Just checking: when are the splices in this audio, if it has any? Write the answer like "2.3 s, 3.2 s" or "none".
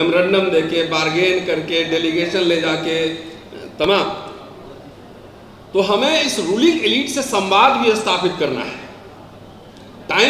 none